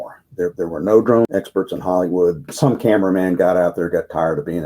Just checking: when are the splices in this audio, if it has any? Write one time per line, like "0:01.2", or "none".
0:01.3
0:02.5